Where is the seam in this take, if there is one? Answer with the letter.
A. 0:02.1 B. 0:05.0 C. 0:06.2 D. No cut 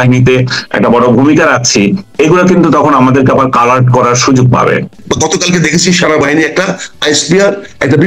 B